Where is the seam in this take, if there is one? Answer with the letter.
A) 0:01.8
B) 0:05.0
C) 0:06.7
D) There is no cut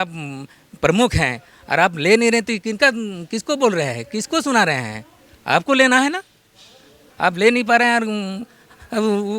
D